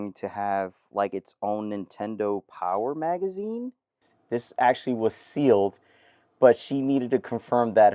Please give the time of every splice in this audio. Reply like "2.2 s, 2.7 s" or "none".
4.1 s